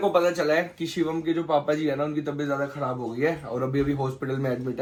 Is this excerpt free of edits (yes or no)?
yes